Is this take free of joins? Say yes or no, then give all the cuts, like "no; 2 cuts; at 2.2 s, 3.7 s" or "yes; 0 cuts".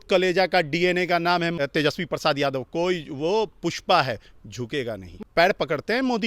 no; 2 cuts; at 1.5 s, 5.0 s